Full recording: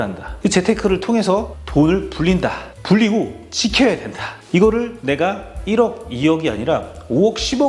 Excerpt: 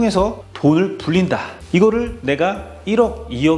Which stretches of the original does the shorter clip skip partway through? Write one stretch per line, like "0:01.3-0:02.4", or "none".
0:02.7-0:04.3